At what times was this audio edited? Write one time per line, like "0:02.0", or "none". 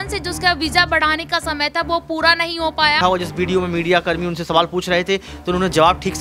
0:03.0